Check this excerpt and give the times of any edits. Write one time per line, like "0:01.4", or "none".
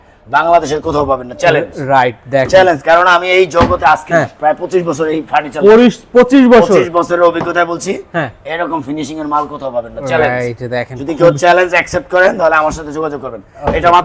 none

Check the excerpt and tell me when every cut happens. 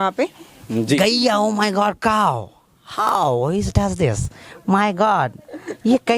0:01.0

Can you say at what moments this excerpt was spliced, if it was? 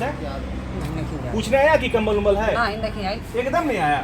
none

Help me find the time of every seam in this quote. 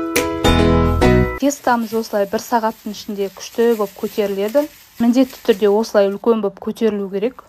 0:00.9

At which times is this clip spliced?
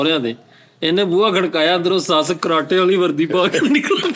none

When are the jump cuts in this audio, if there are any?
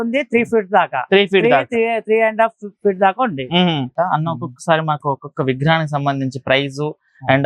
0:03.9

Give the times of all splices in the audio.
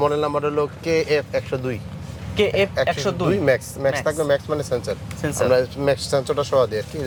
none

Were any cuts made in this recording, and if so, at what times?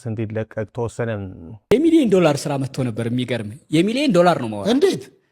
0:01.5

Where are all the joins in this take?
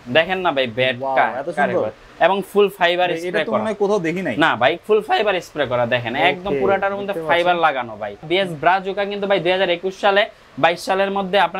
0:08.3

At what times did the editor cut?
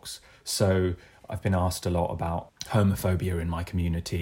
0:02.5

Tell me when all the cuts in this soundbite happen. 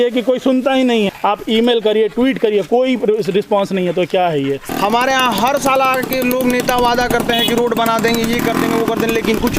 0:01.1
0:04.6

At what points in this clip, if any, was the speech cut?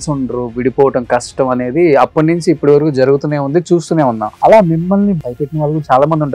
0:04.3
0:05.2

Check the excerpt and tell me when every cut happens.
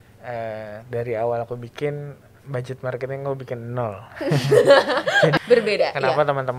0:05.3

